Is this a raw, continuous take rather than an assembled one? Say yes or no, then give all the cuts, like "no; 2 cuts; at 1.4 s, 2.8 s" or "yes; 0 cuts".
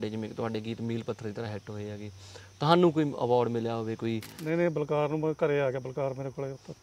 no; 1 cut; at 4.3 s